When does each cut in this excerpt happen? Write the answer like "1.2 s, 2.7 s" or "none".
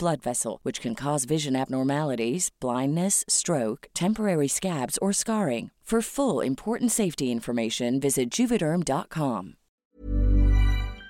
9.8 s